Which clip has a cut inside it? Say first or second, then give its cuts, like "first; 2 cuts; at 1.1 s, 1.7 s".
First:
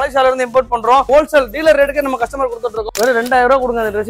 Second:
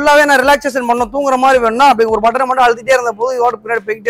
first; 2 cuts; at 1.1 s, 2.9 s